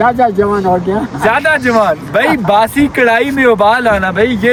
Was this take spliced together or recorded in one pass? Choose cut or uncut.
uncut